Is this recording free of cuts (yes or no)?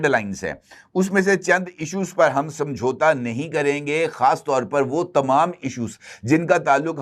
yes